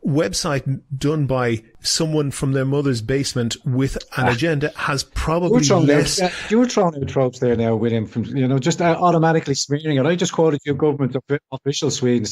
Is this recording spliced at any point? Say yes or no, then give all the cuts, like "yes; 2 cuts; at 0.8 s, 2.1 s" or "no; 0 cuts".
yes; 1 cut; at 1.8 s